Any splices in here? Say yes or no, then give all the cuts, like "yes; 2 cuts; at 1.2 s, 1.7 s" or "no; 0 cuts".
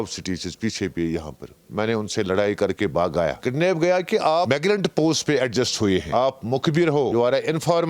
yes; 4 cuts; at 3.4 s, 4.5 s, 6.1 s, 7.1 s